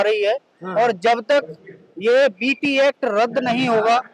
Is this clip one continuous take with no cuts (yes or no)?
yes